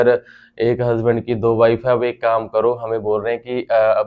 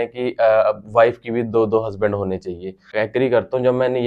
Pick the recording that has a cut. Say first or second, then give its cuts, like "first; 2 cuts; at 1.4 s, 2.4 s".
second; 1 cut; at 2.9 s